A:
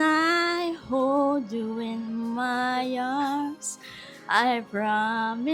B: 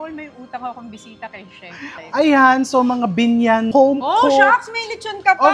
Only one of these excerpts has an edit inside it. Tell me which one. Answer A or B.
B